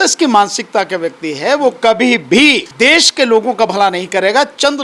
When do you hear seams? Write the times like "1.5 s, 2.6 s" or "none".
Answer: 2.7 s